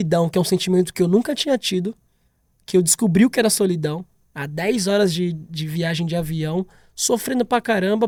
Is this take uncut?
yes; 0 cuts

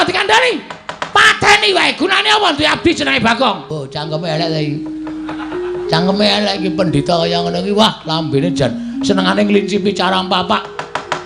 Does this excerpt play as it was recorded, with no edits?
no; 1 cut; at 3.7 s

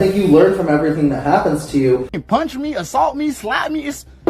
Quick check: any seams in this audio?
yes; 1 cut; at 2.1 s

